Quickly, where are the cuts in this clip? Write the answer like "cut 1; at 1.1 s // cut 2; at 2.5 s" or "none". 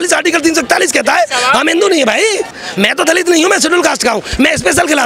cut 1; at 2.6 s